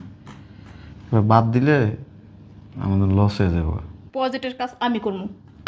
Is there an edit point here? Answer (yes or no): no